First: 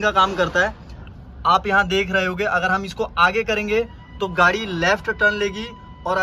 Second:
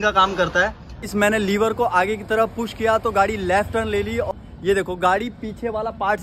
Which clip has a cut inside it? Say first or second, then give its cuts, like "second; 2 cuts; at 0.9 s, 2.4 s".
second; 2 cuts; at 1.1 s, 4.3 s